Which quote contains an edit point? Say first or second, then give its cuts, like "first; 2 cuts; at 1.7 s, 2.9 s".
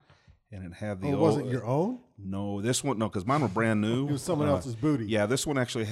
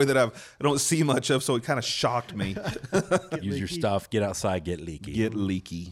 second; 1 cut; at 3.3 s